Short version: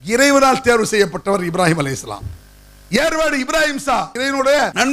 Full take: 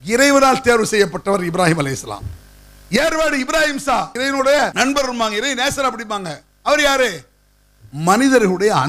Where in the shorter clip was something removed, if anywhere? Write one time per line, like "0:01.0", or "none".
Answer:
none